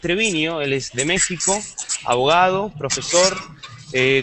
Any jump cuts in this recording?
yes; 1 cut; at 3.2 s

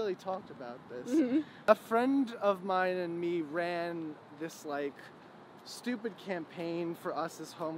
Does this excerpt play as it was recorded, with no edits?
no; 1 cut; at 1.7 s

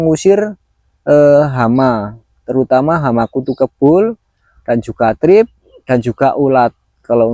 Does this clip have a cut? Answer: no; 0 cuts

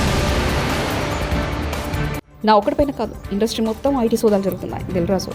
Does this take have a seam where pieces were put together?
no; 0 cuts

